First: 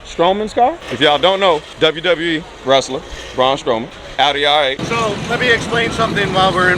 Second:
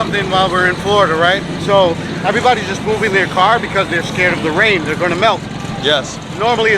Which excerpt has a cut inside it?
first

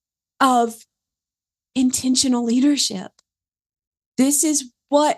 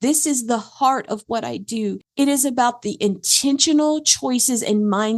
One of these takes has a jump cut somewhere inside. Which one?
second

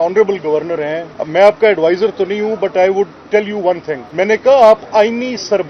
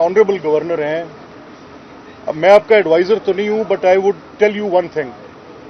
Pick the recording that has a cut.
first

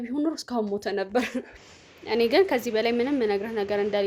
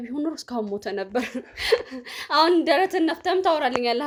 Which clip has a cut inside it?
first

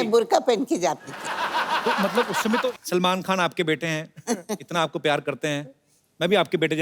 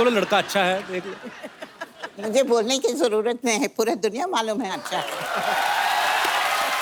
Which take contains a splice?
first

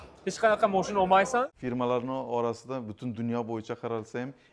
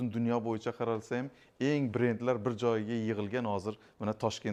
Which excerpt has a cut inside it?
first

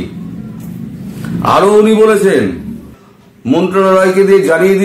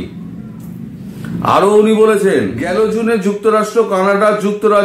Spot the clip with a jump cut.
first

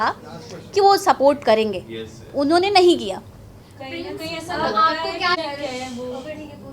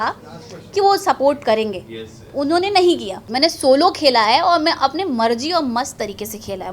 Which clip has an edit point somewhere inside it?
second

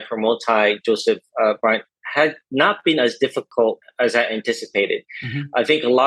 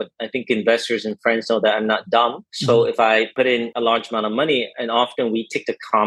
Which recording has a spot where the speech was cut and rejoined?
second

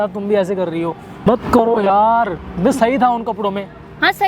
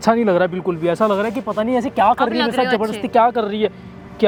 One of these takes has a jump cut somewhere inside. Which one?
first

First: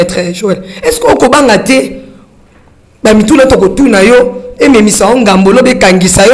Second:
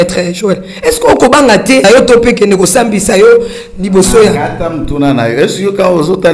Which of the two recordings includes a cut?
second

